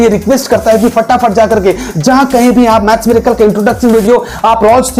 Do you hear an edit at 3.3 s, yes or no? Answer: no